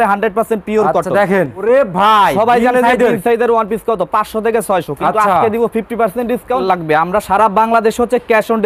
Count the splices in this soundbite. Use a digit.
2